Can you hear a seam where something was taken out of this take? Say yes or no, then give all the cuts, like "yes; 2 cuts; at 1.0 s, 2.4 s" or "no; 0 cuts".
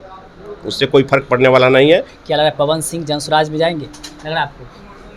yes; 1 cut; at 2.2 s